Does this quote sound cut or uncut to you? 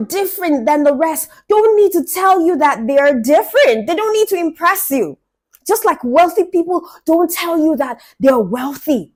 uncut